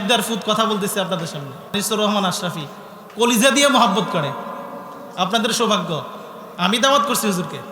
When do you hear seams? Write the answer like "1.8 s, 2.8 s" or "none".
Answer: 1.7 s